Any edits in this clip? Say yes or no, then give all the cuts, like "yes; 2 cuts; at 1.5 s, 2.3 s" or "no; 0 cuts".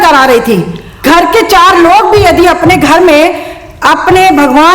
yes; 1 cut; at 1.0 s